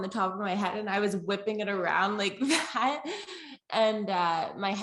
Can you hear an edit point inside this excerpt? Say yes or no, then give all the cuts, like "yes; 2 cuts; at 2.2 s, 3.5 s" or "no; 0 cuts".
no; 0 cuts